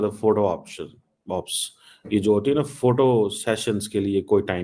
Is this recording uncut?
yes; 0 cuts

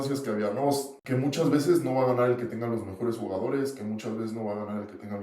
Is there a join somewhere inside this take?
yes; 1 cut; at 0.9 s

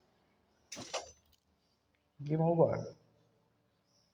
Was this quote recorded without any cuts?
yes; 0 cuts

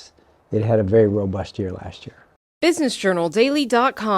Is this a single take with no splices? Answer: no; 1 cut; at 2.2 s

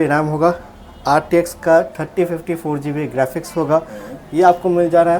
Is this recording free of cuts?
yes; 0 cuts

